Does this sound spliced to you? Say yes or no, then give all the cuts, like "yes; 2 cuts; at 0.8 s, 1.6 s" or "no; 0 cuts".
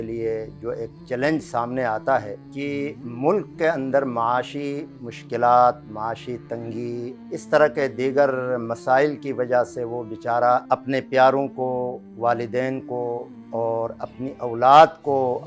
yes; 3 cuts; at 2.4 s, 7.2 s, 10.6 s